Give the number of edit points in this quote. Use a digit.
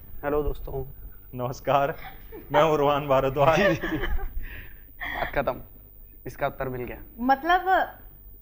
0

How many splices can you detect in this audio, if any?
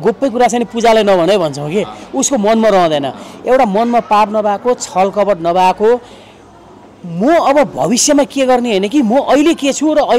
0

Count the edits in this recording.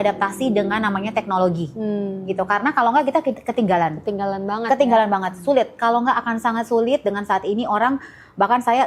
0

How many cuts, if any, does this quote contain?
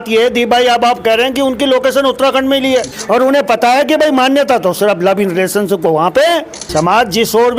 2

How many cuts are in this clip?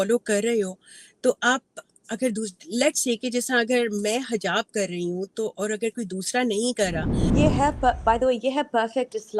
1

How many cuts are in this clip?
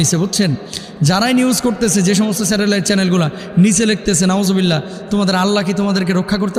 0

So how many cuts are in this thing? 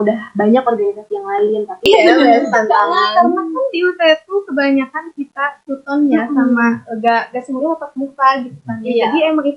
1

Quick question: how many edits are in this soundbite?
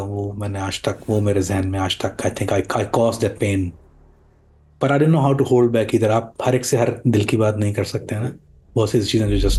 0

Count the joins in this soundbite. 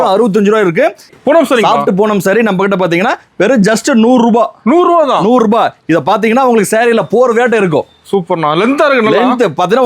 1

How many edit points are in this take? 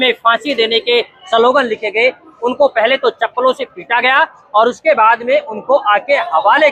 0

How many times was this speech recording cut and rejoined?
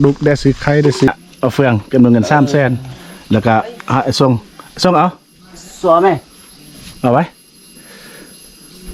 1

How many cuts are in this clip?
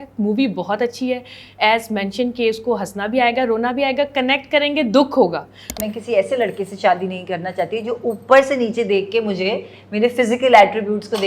1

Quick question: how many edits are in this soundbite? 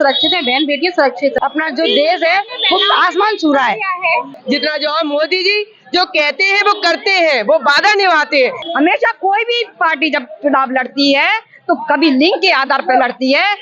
3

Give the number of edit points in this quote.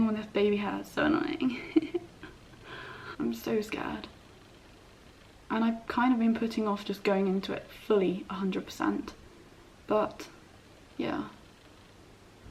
1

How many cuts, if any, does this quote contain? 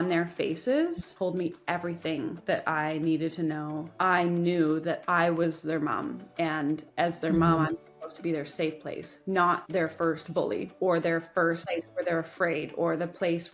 7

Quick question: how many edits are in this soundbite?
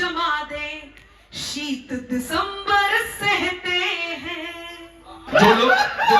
1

